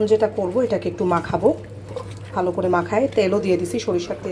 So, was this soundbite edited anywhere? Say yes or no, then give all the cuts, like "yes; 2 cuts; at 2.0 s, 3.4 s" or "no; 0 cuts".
no; 0 cuts